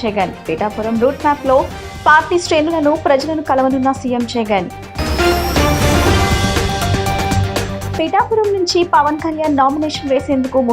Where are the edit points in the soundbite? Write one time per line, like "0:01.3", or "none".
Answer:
none